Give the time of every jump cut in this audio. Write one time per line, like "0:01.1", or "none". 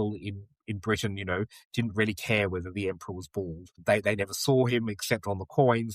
0:03.8

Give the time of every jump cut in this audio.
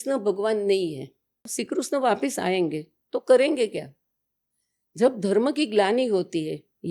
0:01.6

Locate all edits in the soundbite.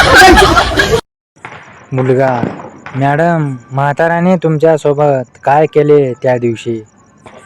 0:01.2

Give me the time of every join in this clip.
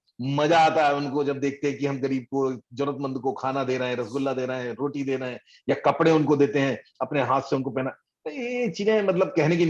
none

